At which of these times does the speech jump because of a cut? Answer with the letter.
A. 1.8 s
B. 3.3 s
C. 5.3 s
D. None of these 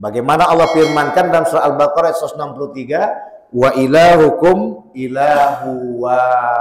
D